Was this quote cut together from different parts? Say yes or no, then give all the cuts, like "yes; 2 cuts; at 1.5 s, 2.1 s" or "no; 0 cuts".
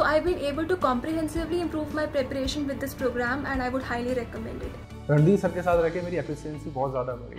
no; 0 cuts